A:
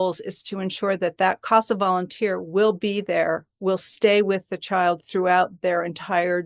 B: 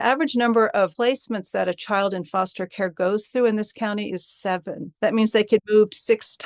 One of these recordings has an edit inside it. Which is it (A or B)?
B